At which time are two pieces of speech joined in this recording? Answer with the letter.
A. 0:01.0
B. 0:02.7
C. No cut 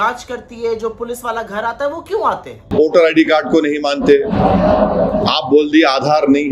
B